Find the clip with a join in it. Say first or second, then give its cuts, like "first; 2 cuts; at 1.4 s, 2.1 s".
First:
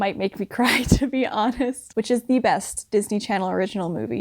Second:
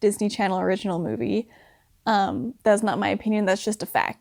first; 1 cut; at 1.8 s